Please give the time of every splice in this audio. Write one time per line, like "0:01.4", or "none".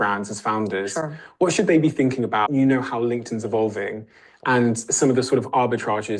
0:02.5